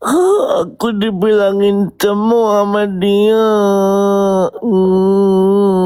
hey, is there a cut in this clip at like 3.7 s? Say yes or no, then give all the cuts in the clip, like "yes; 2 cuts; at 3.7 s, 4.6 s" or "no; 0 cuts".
no; 0 cuts